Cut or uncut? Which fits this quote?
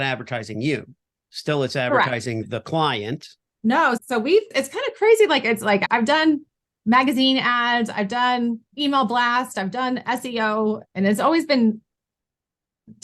cut